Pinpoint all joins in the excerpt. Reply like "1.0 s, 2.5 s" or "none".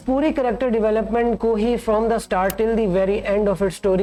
none